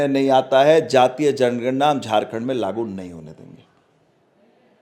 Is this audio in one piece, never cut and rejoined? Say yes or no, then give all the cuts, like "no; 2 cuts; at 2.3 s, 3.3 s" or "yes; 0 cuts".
yes; 0 cuts